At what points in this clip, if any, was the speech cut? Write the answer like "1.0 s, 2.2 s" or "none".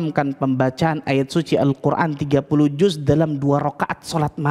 none